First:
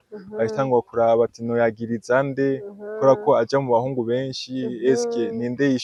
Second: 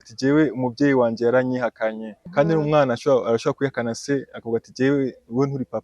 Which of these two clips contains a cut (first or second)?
second